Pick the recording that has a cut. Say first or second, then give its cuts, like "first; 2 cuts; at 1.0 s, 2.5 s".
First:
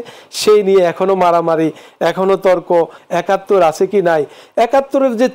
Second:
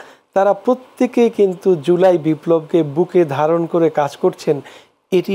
first; 1 cut; at 3.0 s